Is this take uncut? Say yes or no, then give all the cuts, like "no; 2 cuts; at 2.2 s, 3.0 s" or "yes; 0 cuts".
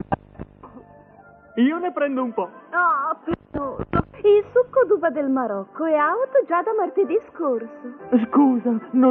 no; 1 cut; at 5.0 s